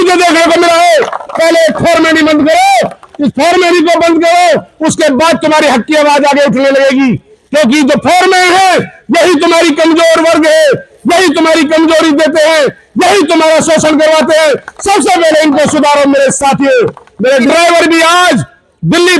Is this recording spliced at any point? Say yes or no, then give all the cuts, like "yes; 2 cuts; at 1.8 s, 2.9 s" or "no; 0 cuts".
yes; 1 cut; at 17.4 s